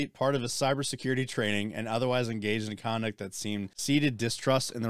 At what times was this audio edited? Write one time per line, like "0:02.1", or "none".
0:03.7